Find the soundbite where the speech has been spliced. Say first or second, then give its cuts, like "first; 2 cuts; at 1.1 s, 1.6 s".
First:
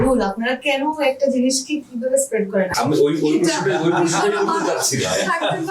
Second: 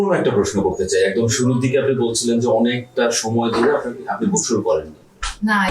first; 1 cut; at 2.7 s